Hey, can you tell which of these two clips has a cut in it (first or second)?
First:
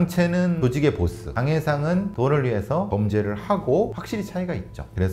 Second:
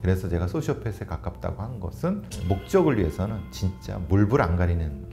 first